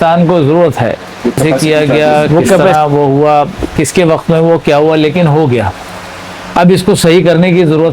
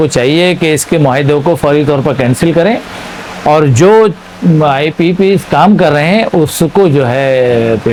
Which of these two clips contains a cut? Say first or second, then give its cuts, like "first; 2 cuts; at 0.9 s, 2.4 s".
first; 1 cut; at 1.5 s